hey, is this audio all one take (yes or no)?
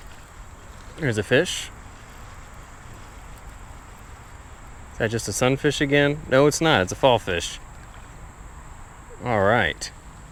yes